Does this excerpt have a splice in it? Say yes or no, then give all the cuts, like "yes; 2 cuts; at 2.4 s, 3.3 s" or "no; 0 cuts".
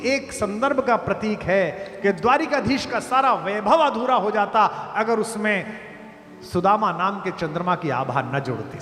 no; 0 cuts